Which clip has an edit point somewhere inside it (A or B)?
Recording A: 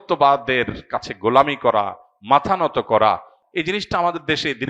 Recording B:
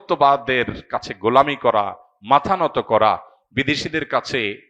A